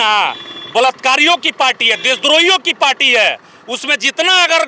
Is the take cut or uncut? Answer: uncut